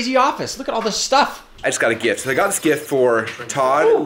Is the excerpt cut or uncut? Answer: cut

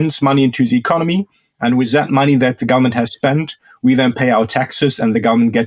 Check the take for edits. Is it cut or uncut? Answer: uncut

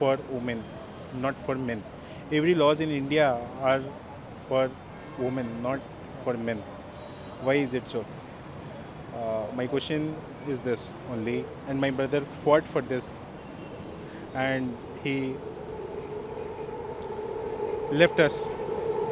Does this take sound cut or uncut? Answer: uncut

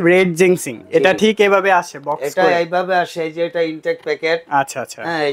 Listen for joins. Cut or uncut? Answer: uncut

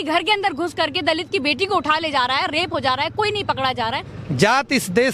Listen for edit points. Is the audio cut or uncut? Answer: cut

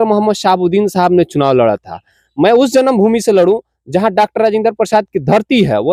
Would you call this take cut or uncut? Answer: uncut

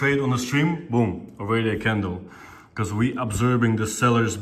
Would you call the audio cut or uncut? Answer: uncut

